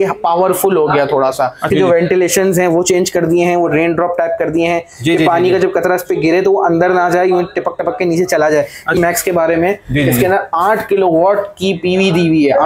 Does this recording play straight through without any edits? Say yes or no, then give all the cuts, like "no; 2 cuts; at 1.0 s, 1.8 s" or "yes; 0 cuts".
no; 2 cuts; at 1.6 s, 9.0 s